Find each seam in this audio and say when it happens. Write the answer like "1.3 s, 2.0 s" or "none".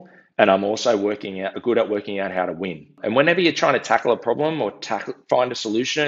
2.9 s